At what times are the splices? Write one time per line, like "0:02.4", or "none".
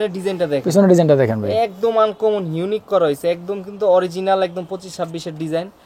none